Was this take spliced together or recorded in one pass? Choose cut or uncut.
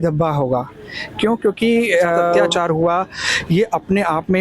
cut